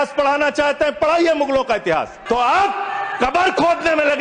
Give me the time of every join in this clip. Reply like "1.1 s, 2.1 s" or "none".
2.2 s